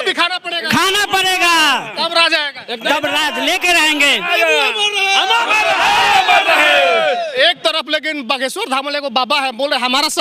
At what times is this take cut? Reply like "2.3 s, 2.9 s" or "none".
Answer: none